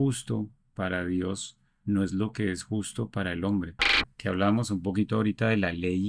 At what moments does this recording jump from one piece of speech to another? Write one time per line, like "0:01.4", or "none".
0:04.1